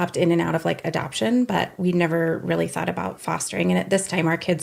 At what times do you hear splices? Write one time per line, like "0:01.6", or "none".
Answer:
none